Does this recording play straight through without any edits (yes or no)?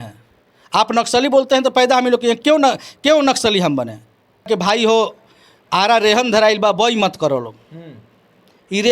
no